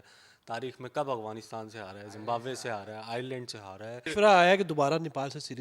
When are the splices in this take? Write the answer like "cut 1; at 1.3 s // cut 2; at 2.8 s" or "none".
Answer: cut 1; at 4.1 s